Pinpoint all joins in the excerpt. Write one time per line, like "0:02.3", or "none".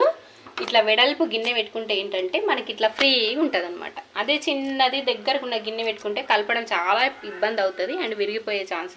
none